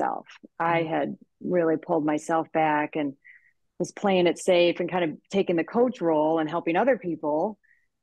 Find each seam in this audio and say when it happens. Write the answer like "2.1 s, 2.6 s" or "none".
none

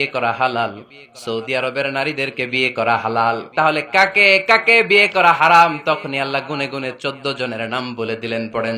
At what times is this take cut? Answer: 3.5 s

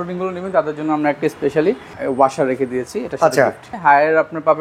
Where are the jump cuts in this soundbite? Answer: 2.0 s, 3.7 s

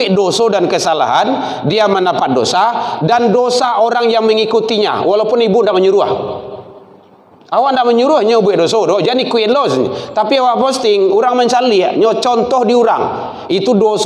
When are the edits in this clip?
none

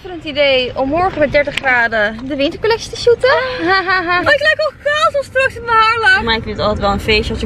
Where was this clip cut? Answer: 4.2 s, 6.2 s

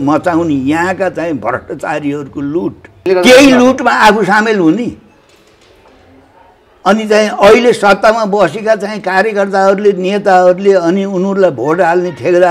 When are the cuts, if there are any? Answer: 3.0 s

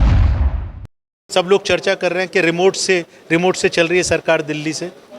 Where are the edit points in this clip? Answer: 1.2 s

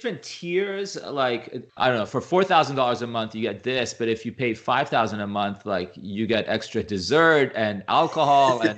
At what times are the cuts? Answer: 1.6 s

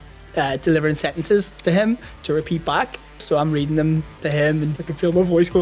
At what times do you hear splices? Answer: 3.2 s, 4.7 s

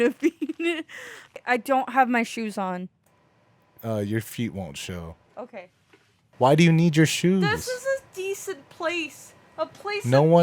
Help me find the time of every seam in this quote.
1.4 s, 6.2 s

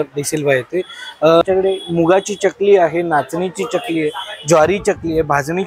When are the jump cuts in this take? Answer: 1.4 s

